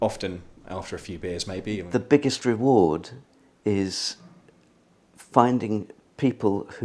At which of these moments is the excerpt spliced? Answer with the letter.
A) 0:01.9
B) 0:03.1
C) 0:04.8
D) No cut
A